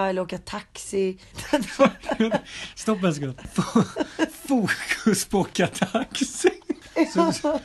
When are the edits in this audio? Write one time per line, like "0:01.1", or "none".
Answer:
0:01.3
0:03.4
0:06.8